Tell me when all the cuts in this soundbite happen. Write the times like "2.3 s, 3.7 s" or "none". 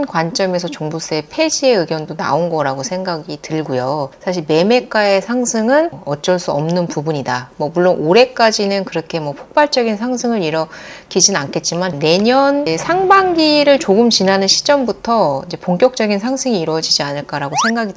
12.0 s